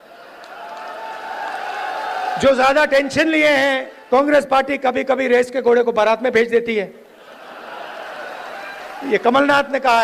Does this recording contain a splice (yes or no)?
yes